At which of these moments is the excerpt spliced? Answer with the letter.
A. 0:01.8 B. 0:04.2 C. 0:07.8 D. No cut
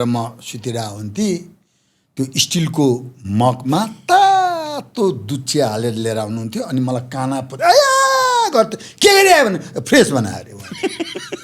D